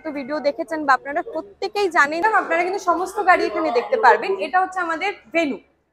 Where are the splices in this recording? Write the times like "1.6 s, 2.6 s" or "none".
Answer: 2.2 s